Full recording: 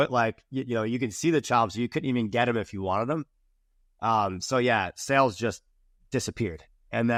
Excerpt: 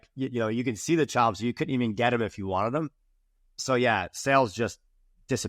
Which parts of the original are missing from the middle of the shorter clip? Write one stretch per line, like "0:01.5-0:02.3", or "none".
0:03.9-0:04.4